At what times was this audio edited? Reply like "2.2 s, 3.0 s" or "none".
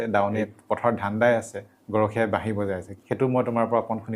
1.7 s, 3.0 s